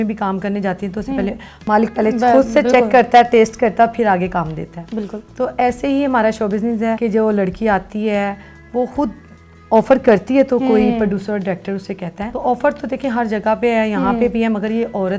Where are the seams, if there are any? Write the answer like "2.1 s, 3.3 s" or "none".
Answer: none